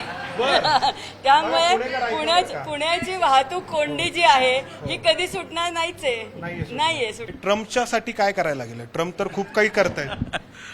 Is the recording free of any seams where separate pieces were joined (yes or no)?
no